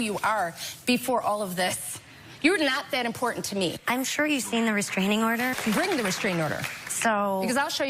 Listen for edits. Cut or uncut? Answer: uncut